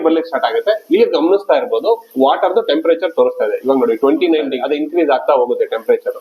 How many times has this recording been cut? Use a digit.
1